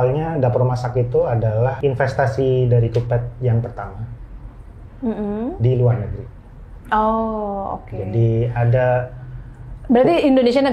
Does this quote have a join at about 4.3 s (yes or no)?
no